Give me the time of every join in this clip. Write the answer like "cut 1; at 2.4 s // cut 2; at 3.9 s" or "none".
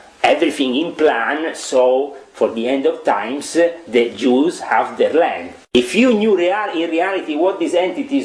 cut 1; at 5.7 s